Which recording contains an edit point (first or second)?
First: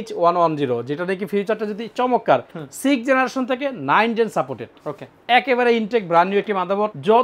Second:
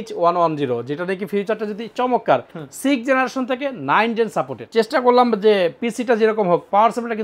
second